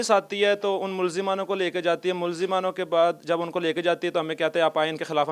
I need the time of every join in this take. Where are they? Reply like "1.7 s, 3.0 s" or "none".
none